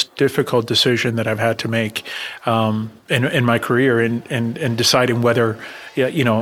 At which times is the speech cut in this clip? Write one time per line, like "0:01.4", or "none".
none